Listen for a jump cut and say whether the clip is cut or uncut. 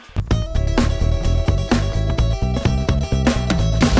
uncut